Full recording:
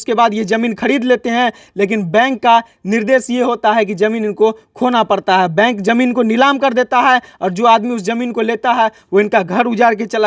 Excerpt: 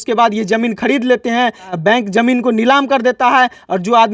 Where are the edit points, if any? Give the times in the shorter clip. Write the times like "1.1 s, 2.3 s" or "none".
1.8 s